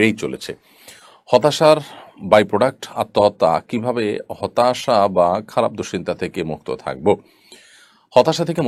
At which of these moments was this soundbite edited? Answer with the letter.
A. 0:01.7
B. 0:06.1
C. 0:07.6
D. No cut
D